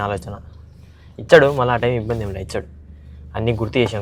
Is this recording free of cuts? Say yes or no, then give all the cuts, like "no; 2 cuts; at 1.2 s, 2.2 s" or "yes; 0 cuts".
yes; 0 cuts